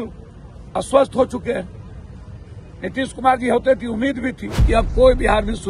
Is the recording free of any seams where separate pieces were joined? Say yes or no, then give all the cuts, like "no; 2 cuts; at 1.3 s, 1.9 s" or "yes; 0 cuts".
no; 1 cut; at 4.6 s